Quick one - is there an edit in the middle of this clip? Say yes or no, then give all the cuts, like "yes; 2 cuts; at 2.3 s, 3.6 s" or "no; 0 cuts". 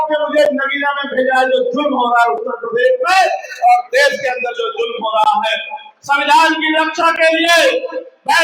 no; 0 cuts